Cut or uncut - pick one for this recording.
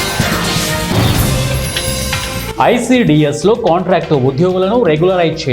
cut